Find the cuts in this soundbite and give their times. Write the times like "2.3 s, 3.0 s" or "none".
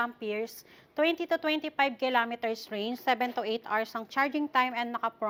none